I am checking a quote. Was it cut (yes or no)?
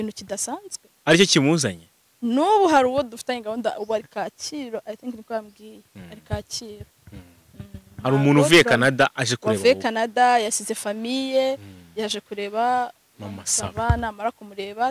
no